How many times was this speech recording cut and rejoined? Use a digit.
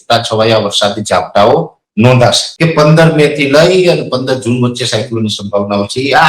1